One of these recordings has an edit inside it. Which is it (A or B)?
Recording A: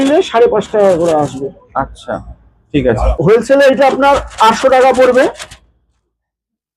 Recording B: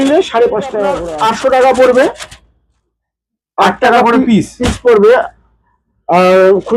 B